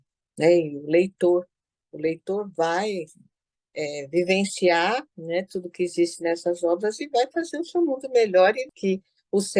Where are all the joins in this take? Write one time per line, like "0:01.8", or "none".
0:08.7